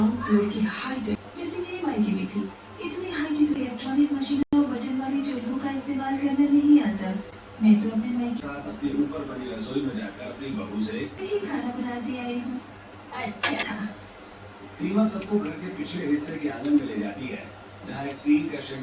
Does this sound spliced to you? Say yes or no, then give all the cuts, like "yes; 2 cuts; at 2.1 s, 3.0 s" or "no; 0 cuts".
no; 0 cuts